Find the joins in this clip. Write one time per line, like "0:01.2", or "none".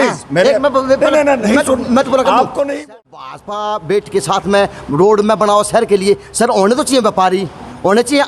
0:02.8